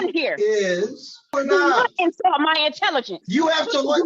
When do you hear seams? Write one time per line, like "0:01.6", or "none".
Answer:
0:01.3